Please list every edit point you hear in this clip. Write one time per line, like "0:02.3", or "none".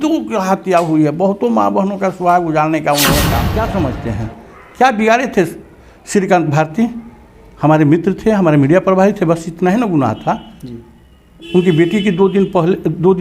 0:03.5